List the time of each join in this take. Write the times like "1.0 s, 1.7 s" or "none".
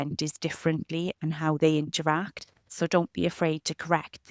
2.6 s